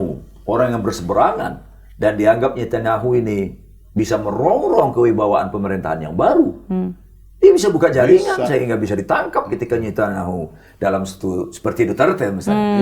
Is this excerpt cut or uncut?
uncut